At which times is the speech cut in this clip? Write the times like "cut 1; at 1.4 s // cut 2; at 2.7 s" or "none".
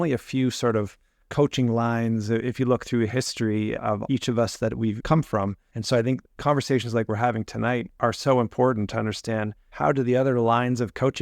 cut 1; at 3.9 s // cut 2; at 5.2 s // cut 3; at 6.3 s // cut 4; at 9.6 s